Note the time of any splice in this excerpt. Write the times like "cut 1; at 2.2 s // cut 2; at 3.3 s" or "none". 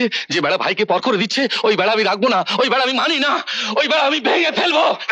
none